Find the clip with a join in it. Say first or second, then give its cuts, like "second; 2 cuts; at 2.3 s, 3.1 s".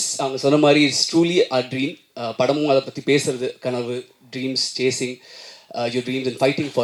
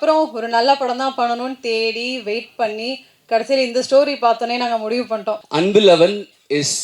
second; 1 cut; at 5.4 s